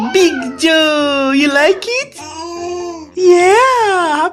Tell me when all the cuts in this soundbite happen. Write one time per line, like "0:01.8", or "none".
none

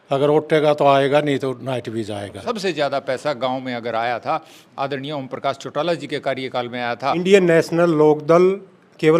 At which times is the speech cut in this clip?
0:02.4
0:07.2

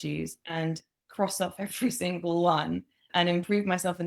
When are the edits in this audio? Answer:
0:03.1

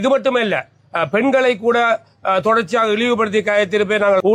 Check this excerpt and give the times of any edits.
none

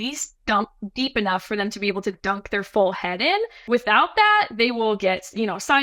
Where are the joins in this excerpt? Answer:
0:03.6

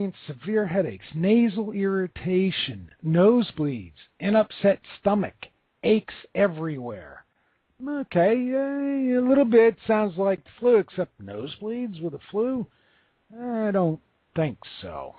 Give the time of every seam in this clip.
0:12.0

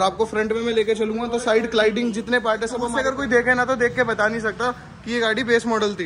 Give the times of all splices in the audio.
0:03.0

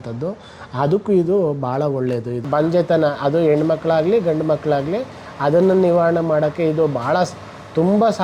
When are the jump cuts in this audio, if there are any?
0:02.5

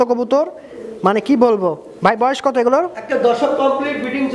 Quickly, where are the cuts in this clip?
none

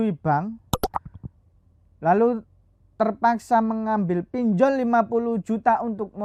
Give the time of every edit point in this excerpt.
none

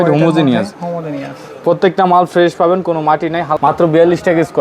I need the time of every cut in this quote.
0:03.6

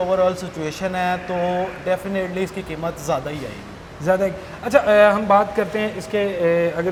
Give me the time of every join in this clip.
none

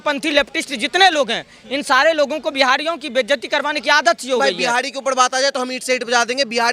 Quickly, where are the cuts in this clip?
0:04.4

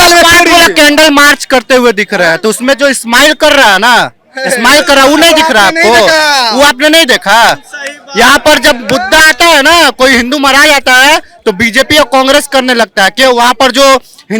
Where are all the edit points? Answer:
none

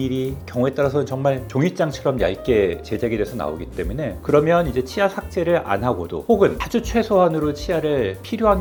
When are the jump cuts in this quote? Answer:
none

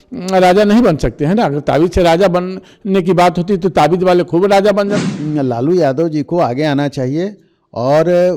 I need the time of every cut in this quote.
0:05.0

